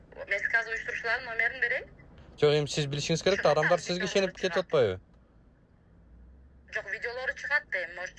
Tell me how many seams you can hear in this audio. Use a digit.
0